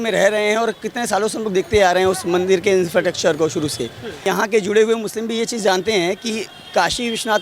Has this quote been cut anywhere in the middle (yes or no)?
yes